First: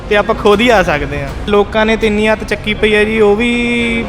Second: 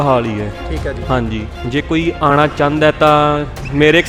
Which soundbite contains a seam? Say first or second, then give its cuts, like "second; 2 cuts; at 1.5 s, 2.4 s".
first; 1 cut; at 1.5 s